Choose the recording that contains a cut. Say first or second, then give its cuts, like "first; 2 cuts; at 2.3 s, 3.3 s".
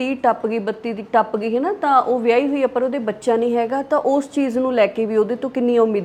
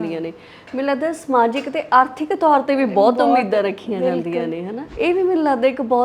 second; 1 cut; at 4.8 s